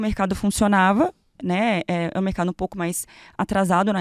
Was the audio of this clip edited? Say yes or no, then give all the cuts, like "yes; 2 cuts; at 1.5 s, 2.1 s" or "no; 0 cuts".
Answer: no; 0 cuts